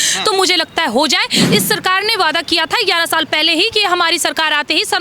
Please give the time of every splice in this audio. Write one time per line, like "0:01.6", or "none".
0:01.3